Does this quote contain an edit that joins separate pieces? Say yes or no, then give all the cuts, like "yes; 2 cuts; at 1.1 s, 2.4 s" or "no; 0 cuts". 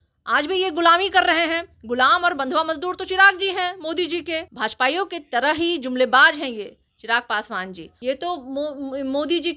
yes; 2 cuts; at 4.5 s, 7.8 s